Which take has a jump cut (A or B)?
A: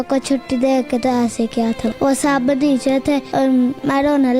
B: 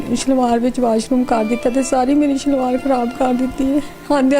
A